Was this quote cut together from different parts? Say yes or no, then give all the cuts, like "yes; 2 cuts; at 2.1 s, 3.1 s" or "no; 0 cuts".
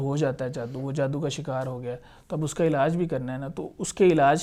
no; 0 cuts